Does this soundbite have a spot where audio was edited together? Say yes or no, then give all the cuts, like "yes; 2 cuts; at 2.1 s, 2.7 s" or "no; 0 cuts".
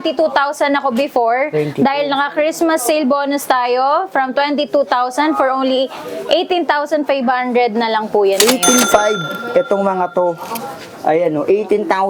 no; 0 cuts